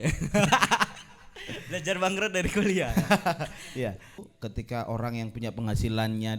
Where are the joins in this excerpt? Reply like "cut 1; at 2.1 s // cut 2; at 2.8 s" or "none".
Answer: cut 1; at 4.3 s